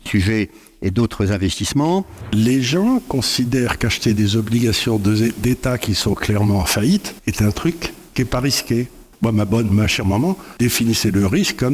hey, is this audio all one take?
no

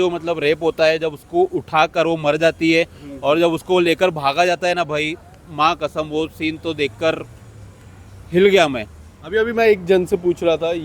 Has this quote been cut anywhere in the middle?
no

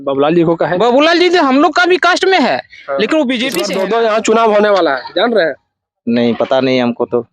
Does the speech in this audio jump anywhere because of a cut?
yes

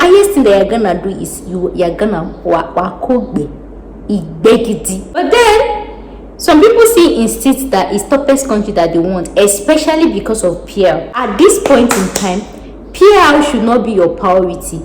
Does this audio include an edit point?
yes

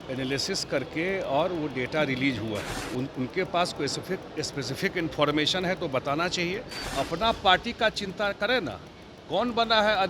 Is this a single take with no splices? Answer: no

